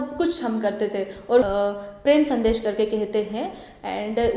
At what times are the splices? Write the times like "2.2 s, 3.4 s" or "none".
1.4 s